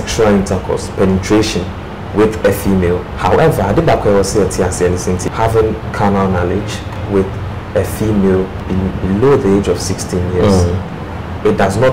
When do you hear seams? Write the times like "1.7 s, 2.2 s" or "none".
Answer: 3.1 s, 8.6 s